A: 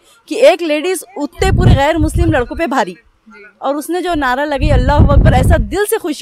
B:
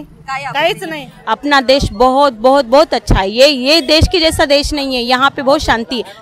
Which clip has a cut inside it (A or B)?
B